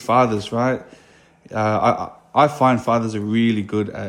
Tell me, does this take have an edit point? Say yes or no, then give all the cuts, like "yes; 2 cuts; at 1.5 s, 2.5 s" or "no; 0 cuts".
no; 0 cuts